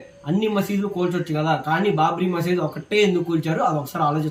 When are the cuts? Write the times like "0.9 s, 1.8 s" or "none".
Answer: none

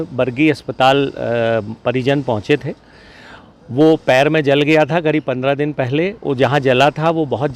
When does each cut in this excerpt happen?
none

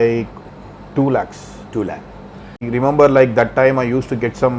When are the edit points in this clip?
2.6 s

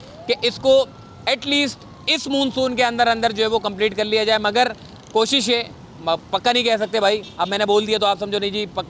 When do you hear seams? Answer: none

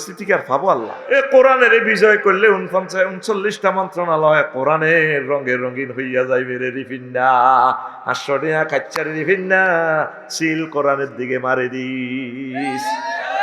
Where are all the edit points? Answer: 1.0 s

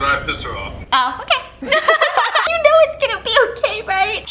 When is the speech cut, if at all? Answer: 2.5 s

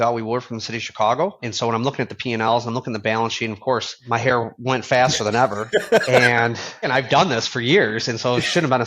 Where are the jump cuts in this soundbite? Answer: 1.5 s, 3.9 s, 6.9 s

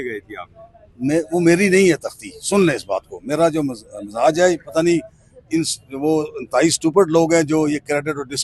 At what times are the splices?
none

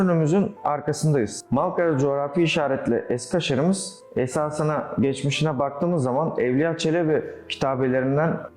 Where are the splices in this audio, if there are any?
1.4 s

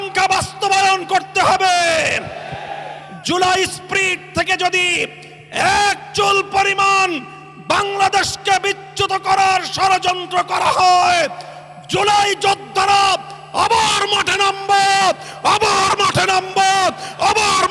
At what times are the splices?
none

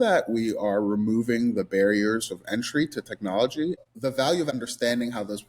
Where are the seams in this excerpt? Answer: 3.8 s, 4.5 s

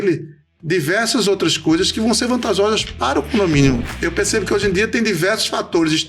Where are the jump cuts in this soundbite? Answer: 3.9 s

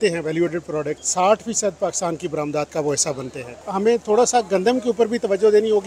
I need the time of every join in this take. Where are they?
1.0 s, 3.7 s

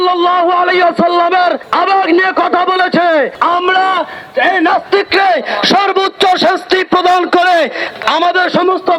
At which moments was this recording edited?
1.6 s, 3.3 s, 8.0 s

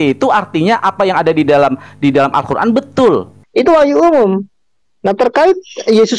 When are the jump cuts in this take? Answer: 3.4 s

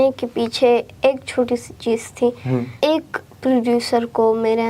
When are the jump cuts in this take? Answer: 2.7 s

